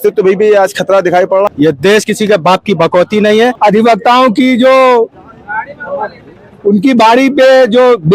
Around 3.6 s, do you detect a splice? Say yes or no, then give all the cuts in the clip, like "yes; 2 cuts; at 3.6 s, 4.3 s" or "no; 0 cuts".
yes; 2 cuts; at 1.5 s, 3.6 s